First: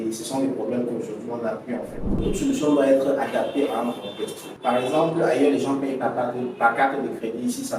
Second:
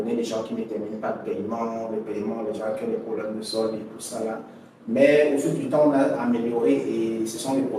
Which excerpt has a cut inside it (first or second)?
first